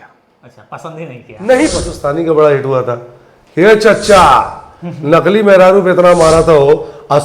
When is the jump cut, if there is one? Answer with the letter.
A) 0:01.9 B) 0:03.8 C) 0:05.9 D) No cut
A